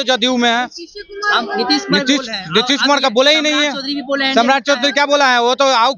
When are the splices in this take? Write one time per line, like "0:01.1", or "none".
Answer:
none